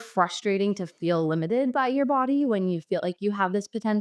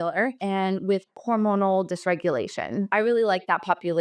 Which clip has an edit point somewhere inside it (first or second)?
second